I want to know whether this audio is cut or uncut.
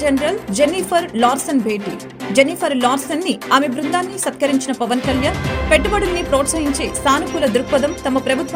uncut